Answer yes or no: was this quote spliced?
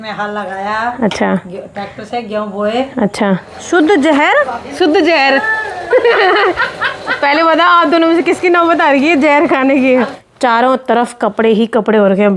yes